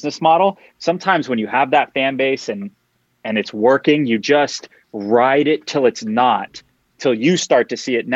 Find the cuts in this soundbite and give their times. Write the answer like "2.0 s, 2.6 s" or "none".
none